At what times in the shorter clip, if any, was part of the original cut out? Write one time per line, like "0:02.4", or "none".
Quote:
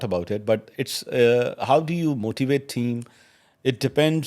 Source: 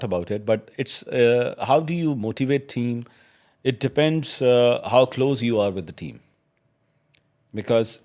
none